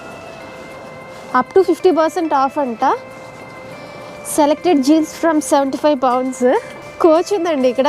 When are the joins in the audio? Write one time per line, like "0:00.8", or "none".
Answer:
0:06.8